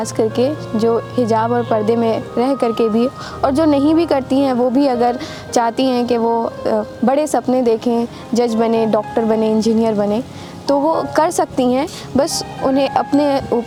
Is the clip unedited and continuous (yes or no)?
yes